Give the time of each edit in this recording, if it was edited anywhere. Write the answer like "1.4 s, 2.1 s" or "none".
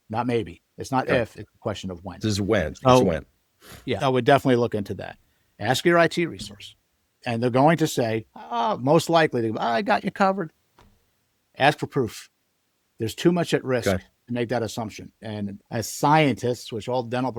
none

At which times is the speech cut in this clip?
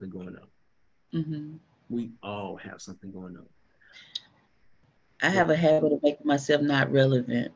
none

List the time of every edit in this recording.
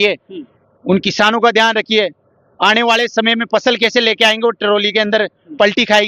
none

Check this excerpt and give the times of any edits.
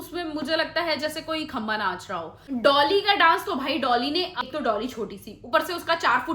2.3 s, 4.4 s

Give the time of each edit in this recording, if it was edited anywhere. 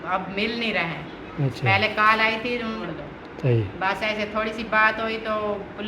2.8 s

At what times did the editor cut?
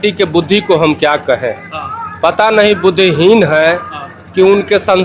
none

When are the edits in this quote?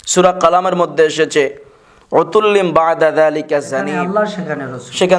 3.9 s

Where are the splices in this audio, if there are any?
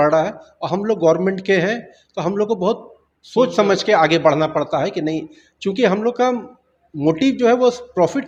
none

